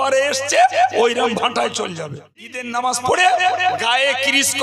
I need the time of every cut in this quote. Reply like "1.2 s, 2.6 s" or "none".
2.5 s